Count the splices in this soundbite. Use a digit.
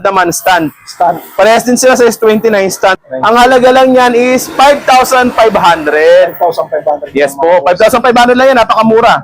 1